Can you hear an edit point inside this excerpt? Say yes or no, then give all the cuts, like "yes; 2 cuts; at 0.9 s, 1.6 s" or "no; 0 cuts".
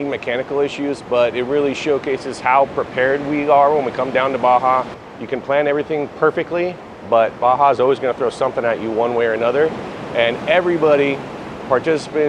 yes; 1 cut; at 5.0 s